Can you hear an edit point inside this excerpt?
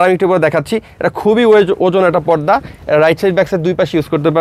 no; 0 cuts

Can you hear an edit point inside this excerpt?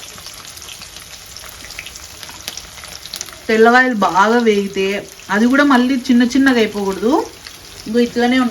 no; 0 cuts

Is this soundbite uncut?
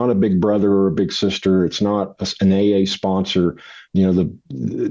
yes; 0 cuts

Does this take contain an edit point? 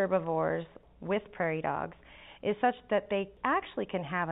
yes; 2 cuts; at 0.8 s, 3.3 s

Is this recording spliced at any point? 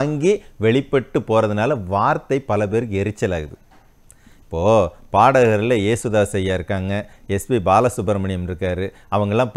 no; 0 cuts

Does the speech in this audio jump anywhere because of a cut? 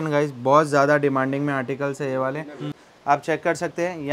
yes; 1 cut; at 2.8 s

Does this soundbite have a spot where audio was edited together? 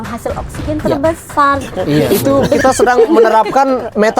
yes; 1 cut; at 2.1 s

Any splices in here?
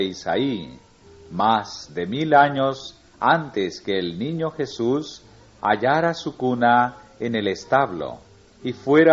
no; 0 cuts

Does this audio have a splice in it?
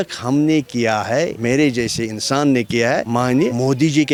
no; 0 cuts

